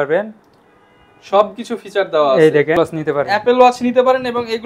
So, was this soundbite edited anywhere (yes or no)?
yes